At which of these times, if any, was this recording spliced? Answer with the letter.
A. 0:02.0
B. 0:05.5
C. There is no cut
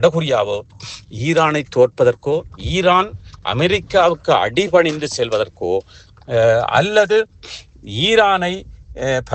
C